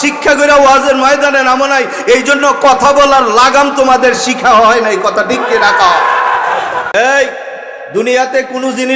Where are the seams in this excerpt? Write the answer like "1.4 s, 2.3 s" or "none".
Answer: 6.9 s